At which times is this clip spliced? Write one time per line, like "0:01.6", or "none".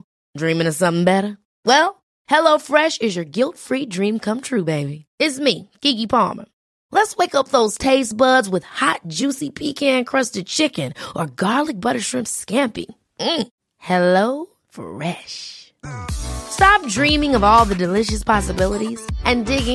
none